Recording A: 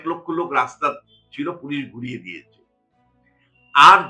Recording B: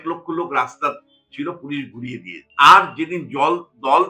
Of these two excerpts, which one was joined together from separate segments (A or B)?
B